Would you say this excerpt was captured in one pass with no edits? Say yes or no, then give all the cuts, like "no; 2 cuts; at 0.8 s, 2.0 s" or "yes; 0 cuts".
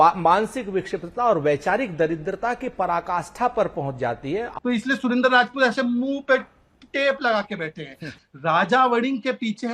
no; 1 cut; at 4.5 s